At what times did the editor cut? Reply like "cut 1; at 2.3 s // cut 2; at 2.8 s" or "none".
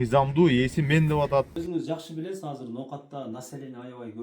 cut 1; at 1.6 s